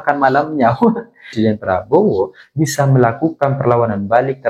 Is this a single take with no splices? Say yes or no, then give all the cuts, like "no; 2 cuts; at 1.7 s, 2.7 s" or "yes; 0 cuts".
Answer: no; 1 cut; at 1.2 s